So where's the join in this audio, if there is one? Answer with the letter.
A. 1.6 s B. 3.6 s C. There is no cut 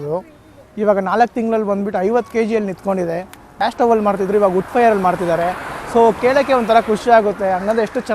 B